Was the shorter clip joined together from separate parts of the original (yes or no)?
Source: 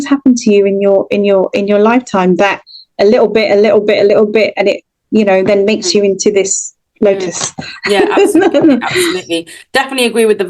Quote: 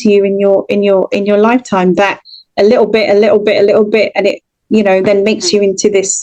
no